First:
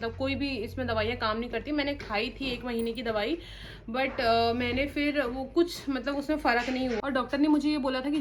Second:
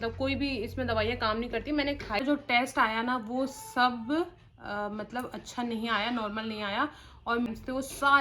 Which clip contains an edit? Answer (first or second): second